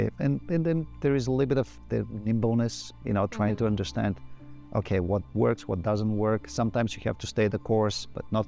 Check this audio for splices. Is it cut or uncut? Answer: uncut